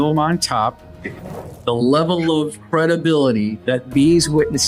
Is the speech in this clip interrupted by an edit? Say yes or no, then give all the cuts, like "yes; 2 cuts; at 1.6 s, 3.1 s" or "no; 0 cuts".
yes; 3 cuts; at 1.4 s, 2.6 s, 3.6 s